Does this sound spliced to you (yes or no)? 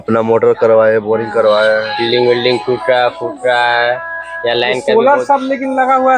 yes